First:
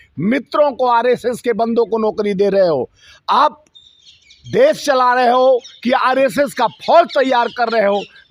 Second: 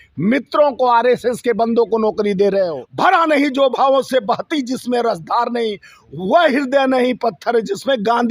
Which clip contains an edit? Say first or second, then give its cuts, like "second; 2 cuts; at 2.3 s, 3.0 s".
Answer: second; 1 cut; at 2.8 s